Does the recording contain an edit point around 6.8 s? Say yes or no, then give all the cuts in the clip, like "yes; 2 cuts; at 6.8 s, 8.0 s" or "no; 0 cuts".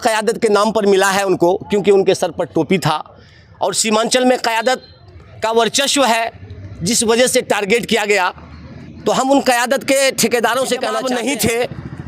no; 1 cut; at 11.0 s